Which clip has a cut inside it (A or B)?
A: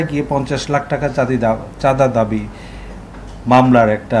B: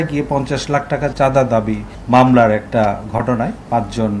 B